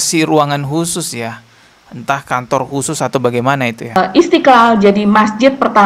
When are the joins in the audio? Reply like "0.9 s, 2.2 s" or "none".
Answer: 4.0 s